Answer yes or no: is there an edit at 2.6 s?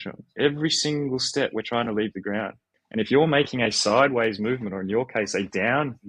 no